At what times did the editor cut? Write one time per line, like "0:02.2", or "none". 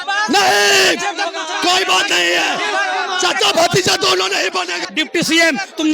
0:04.8